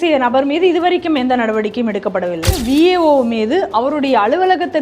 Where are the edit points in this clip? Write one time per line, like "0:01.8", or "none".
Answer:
0:02.5